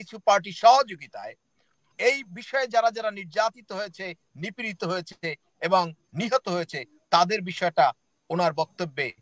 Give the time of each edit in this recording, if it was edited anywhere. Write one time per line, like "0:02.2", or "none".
none